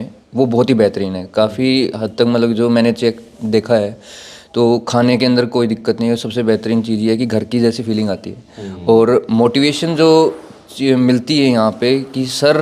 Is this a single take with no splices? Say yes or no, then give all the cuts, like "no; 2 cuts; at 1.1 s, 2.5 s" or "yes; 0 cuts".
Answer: yes; 0 cuts